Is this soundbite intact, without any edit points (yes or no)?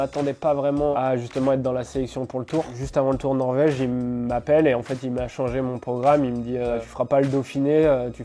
no